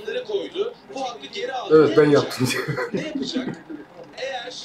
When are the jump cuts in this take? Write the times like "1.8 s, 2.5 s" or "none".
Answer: none